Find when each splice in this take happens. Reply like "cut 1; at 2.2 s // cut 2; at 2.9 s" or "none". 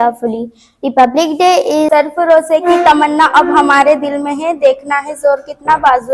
cut 1; at 2.0 s